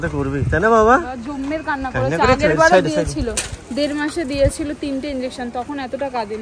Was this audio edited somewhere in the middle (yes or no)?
no